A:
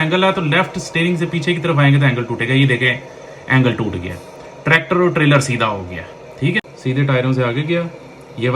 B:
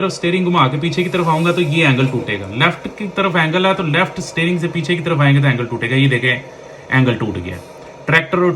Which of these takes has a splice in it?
A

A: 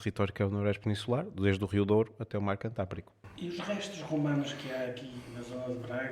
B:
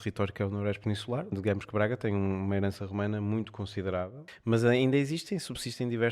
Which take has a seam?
B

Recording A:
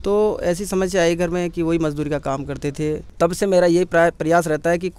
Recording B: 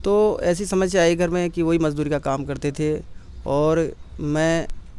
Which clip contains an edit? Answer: A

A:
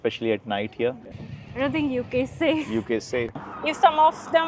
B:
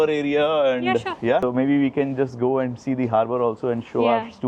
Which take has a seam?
A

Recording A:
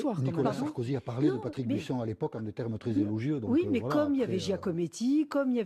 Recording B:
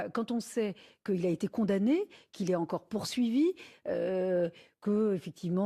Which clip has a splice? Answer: B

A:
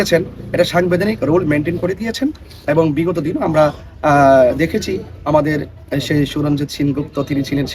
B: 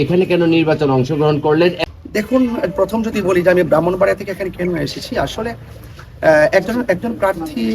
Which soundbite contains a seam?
B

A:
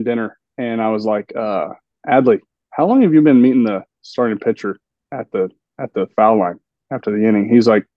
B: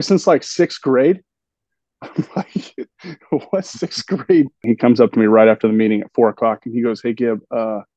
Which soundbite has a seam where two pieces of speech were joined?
B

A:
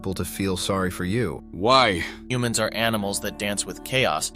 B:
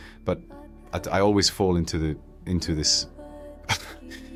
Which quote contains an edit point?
A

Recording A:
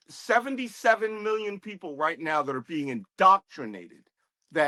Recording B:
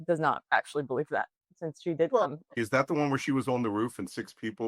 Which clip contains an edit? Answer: B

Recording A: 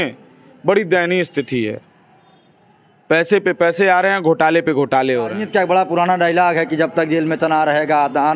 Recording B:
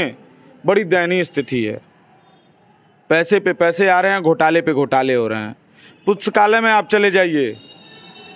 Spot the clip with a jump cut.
A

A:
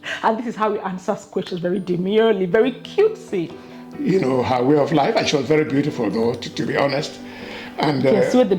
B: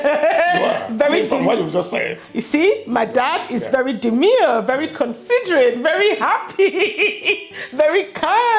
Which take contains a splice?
A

